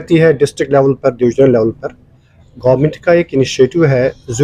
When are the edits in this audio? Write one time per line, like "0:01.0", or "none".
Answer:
none